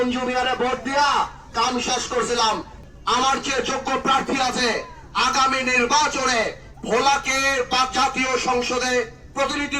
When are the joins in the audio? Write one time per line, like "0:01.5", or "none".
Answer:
0:02.8